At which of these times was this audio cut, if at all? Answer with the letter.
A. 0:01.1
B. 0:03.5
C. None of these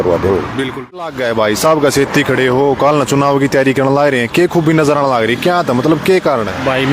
A